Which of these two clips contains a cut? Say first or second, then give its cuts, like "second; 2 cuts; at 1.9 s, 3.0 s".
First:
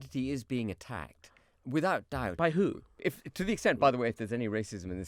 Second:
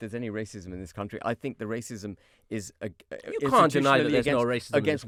first; 1 cut; at 3.1 s